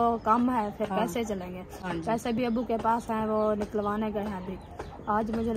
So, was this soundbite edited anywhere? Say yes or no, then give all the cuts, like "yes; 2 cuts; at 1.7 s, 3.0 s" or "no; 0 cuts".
no; 0 cuts